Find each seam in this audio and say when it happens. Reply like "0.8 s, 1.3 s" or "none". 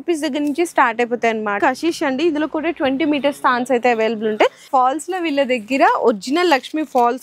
1.6 s, 4.6 s

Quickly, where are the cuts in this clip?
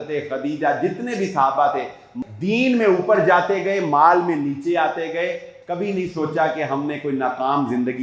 2.1 s

